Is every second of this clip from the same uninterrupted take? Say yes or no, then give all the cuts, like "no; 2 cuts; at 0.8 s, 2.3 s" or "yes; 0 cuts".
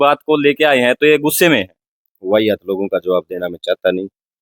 yes; 0 cuts